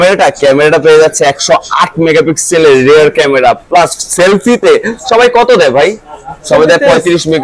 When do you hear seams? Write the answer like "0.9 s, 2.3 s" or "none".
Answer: none